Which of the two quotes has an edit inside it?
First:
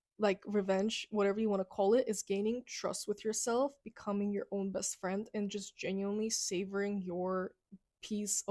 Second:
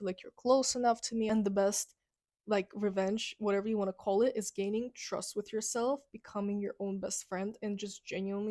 second; 1 cut; at 1.3 s

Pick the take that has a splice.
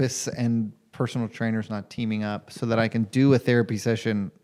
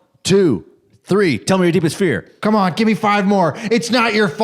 second; 1 cut; at 2.4 s

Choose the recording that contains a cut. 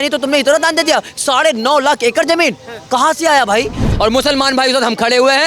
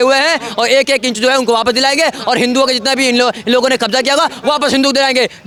first; 1 cut; at 3.9 s

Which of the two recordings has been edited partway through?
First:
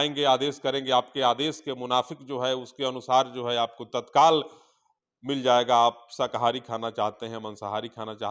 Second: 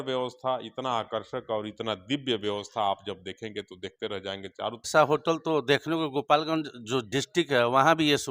second; 1 cut; at 4.9 s

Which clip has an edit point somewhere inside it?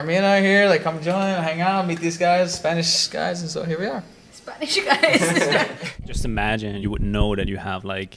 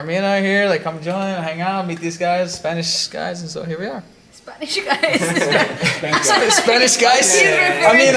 first; 2 cuts; at 5.8 s, 6.8 s

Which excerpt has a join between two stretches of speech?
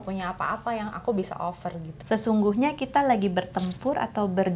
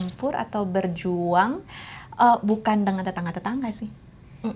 first; 1 cut; at 1.9 s

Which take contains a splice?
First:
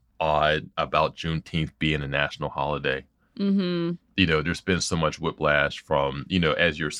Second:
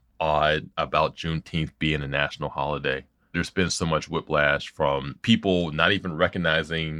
second; 2 cuts; at 3.3 s, 5.1 s

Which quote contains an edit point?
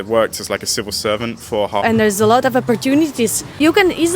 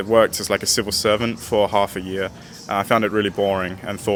first; 1 cut; at 1.8 s

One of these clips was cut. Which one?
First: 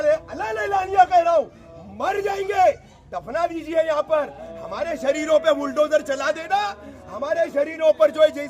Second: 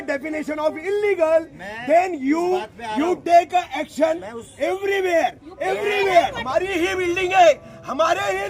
second; 1 cut; at 6.4 s

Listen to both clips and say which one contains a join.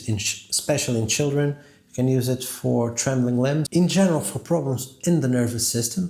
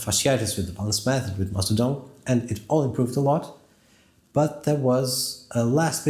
first; 1 cut; at 3.7 s

